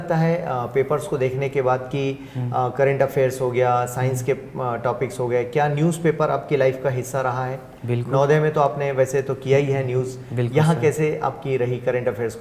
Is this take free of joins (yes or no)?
yes